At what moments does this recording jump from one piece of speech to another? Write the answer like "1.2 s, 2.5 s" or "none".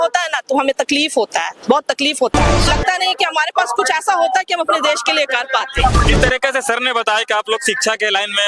2.7 s, 6.0 s